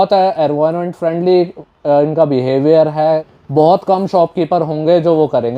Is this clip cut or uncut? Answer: cut